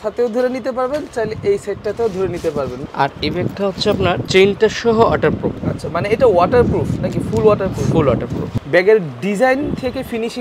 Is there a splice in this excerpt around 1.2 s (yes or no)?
no